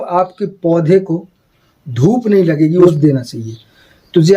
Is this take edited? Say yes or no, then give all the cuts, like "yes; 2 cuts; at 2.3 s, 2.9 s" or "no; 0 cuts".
yes; 1 cut; at 2.8 s